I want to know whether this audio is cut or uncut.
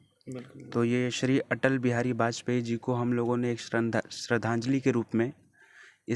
uncut